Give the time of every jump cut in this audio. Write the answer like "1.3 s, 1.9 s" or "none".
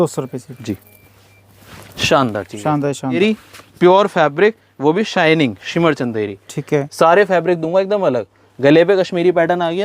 3.2 s